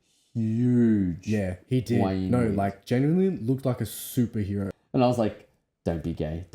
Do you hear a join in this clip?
yes; 1 cut; at 4.7 s

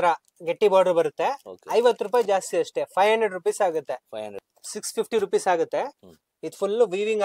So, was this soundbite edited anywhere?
yes; 1 cut; at 4.4 s

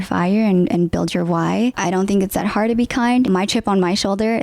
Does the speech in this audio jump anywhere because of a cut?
yes; 2 cuts; at 1.8 s, 3.3 s

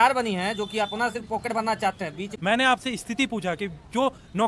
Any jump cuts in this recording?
yes; 1 cut; at 2.3 s

